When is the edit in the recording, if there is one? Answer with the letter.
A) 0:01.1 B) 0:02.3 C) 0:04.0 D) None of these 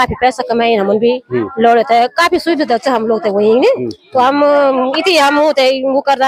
D